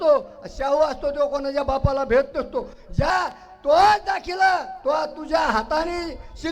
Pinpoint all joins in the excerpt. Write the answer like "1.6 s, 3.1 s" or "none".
3.1 s